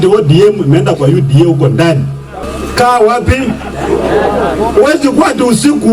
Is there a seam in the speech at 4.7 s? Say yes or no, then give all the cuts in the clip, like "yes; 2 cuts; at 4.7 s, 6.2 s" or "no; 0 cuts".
no; 1 cut; at 2.4 s